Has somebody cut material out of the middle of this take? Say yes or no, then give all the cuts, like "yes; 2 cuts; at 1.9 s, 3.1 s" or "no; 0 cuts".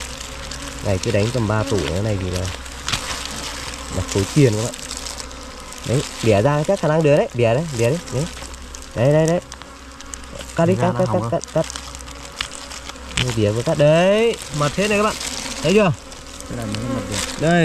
no; 0 cuts